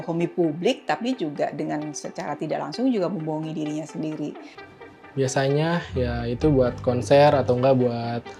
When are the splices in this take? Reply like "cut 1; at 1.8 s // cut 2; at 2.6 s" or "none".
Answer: cut 1; at 4.9 s